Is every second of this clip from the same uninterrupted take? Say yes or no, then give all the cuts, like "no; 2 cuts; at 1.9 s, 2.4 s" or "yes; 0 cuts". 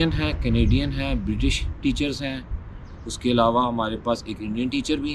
yes; 0 cuts